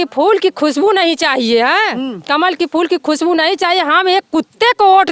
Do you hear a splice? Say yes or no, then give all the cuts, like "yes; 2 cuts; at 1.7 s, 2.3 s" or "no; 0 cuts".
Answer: no; 0 cuts